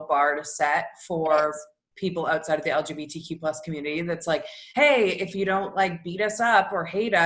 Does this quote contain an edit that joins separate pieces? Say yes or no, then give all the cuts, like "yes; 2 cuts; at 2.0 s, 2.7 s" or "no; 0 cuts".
no; 0 cuts